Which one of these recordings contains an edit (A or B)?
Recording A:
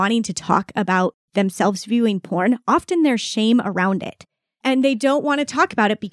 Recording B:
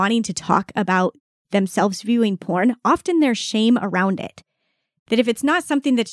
A